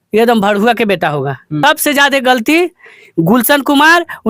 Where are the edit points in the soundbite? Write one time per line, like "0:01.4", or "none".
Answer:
0:01.6